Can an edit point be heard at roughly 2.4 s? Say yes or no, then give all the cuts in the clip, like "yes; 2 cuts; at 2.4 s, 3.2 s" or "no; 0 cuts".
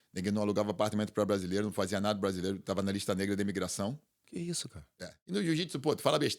no; 1 cut; at 5.1 s